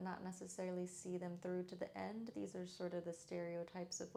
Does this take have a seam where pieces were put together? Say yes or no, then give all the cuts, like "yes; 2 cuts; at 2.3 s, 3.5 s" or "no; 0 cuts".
no; 0 cuts